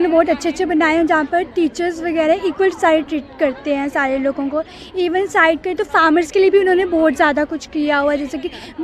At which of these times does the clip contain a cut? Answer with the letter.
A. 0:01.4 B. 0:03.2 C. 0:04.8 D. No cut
D